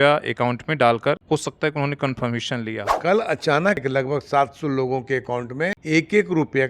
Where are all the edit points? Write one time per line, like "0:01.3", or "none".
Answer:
0:01.2
0:02.9
0:03.8
0:05.8